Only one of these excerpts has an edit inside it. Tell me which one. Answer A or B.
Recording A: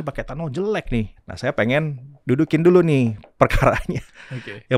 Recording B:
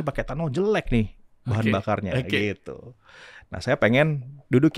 A